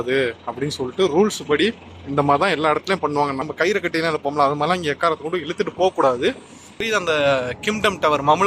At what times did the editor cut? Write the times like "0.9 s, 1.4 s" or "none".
3.4 s, 6.8 s

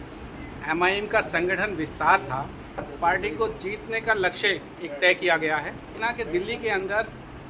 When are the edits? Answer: 2.9 s, 6.0 s

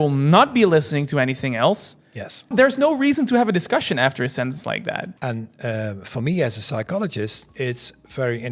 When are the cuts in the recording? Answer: 2.5 s, 5.1 s, 7.4 s

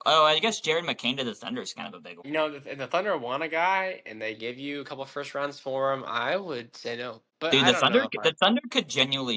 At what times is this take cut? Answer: 2.2 s, 7.5 s

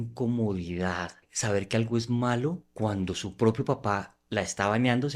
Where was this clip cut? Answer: 1.3 s, 2.7 s, 4.2 s

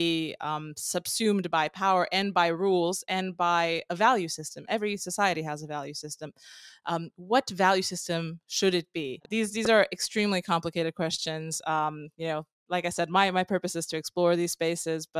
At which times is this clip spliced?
9.3 s

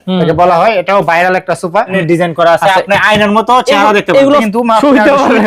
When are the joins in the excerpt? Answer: 2.0 s, 4.5 s

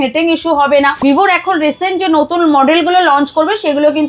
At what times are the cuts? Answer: 1.0 s

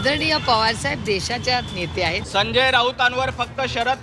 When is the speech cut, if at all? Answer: 2.2 s

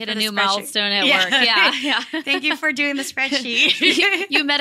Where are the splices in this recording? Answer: none

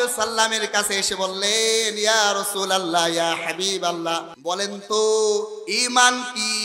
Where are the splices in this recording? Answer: 4.3 s

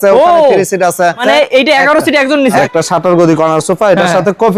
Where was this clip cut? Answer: 1.2 s, 2.6 s

